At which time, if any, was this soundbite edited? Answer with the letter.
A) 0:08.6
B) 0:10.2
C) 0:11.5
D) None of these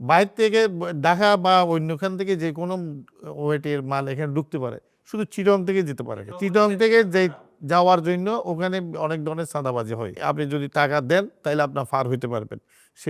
B